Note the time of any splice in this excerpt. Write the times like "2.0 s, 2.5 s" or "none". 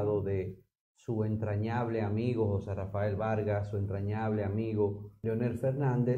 5.1 s